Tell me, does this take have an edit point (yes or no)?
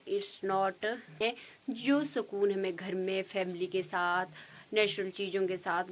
yes